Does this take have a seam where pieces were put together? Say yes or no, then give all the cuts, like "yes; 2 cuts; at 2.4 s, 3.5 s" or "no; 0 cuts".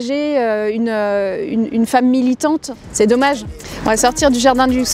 no; 0 cuts